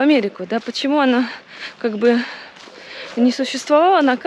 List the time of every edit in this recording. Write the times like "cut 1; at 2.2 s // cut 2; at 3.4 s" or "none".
none

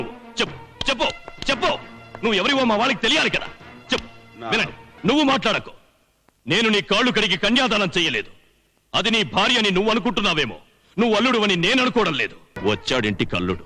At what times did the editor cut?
cut 1; at 4.9 s // cut 2; at 12.6 s

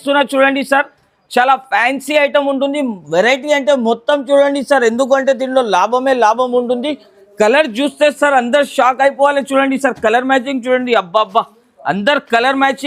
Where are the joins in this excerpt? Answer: none

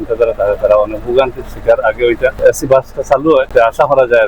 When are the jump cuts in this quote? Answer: cut 1; at 2.4 s

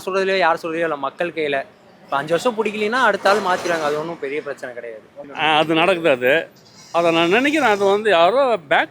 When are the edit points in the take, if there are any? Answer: cut 1; at 5.1 s

